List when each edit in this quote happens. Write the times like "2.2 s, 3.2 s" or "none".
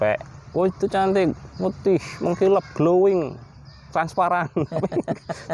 none